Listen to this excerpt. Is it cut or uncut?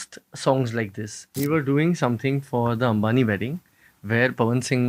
cut